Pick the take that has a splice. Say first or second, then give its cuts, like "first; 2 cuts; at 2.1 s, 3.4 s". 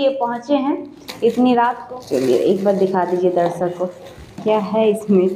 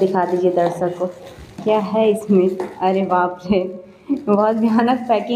first; 1 cut; at 1.8 s